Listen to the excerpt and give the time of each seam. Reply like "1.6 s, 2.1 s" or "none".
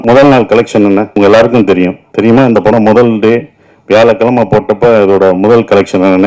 1.1 s, 2.0 s